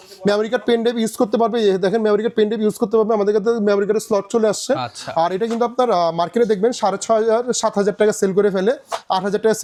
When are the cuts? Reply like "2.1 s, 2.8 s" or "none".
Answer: none